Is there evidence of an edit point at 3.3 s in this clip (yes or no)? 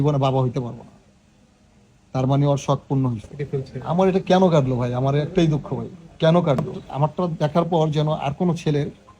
yes